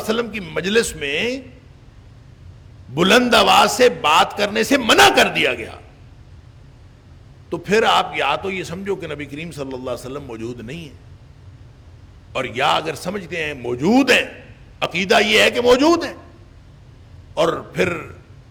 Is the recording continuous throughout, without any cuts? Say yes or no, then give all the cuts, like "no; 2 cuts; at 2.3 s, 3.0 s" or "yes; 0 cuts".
yes; 0 cuts